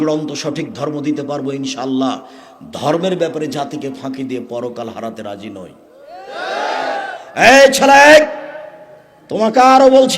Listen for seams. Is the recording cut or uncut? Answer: cut